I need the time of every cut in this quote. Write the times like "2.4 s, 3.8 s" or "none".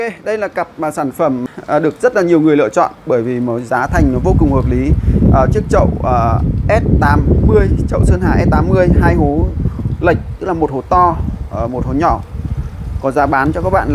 1.5 s